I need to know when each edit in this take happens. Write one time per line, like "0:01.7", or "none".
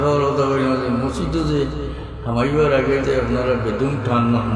none